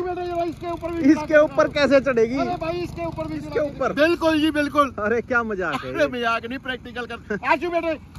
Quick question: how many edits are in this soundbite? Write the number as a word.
one